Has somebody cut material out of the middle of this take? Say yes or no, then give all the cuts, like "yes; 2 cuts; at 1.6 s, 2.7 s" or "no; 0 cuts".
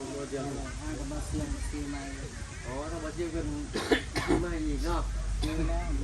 no; 0 cuts